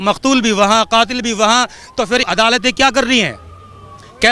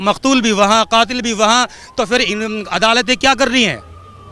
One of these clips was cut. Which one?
first; 1 cut; at 2.2 s

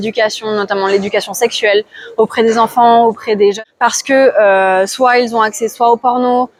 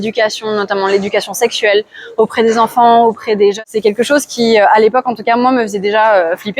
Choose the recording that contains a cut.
second; 1 cut; at 3.7 s

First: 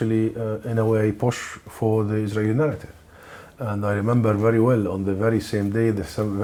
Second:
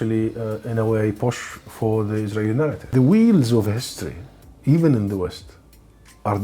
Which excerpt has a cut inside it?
second; 1 cut; at 2.8 s

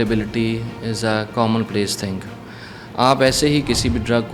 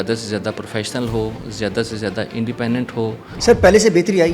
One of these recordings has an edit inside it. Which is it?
second; 1 cut; at 3.4 s

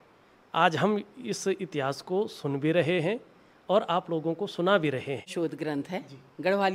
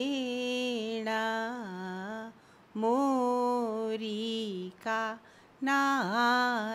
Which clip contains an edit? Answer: first; 1 cut; at 5.3 s

